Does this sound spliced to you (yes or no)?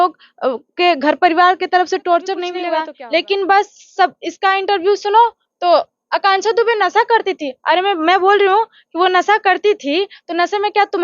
yes